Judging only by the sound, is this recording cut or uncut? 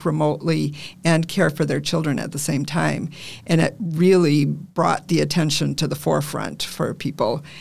uncut